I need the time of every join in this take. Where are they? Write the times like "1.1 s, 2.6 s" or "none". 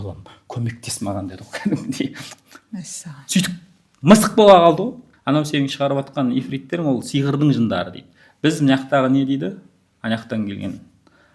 5.1 s